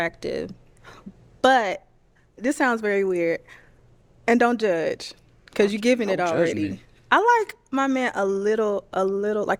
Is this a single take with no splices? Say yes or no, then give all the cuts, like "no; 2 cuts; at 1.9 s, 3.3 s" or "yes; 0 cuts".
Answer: yes; 0 cuts